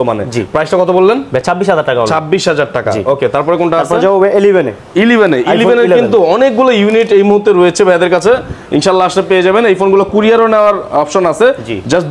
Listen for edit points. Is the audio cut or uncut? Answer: uncut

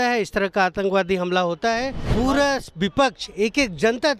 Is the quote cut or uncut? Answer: cut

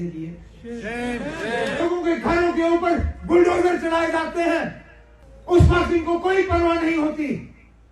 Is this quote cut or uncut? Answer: cut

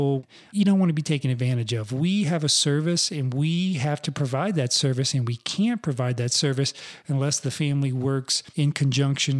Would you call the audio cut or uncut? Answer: cut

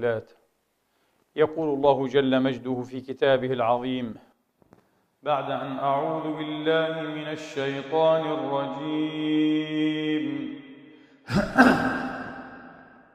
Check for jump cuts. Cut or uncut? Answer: uncut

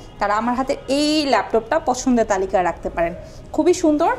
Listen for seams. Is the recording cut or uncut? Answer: uncut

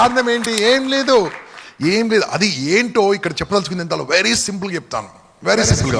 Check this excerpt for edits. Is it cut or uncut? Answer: uncut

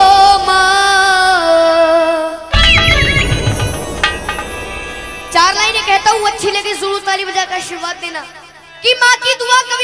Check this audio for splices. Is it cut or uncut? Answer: uncut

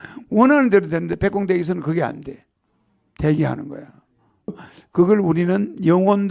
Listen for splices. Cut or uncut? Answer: cut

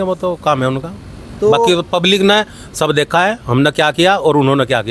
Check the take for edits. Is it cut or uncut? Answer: uncut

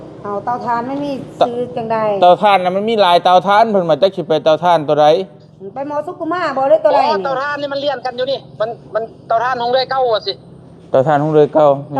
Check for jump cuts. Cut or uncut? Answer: uncut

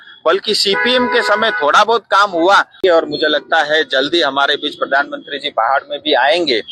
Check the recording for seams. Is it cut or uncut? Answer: cut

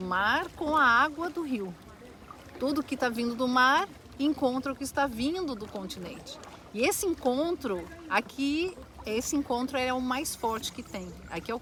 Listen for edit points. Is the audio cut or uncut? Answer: uncut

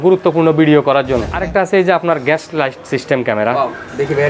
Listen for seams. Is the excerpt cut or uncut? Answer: cut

